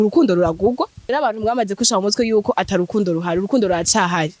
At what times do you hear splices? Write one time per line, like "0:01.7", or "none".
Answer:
0:01.1